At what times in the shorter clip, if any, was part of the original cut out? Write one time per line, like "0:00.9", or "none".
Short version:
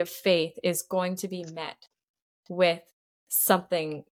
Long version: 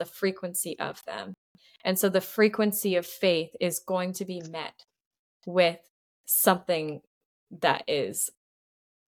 none